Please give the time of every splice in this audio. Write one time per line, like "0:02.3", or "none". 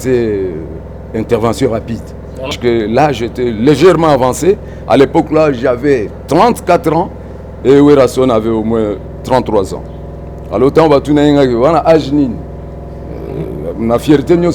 0:02.5